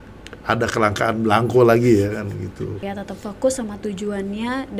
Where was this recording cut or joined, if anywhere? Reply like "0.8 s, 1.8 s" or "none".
2.9 s